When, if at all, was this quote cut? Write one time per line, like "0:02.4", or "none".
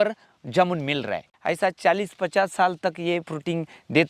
0:01.3